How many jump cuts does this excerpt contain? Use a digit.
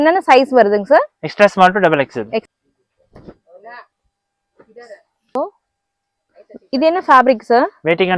1